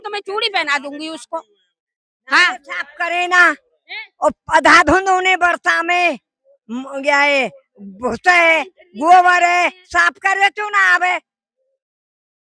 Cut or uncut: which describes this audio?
uncut